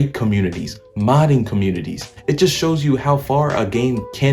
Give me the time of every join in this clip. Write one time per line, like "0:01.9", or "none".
none